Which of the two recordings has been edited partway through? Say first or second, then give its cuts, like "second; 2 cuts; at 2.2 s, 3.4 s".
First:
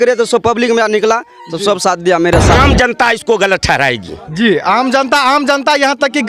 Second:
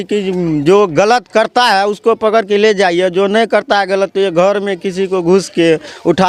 first; 1 cut; at 2.6 s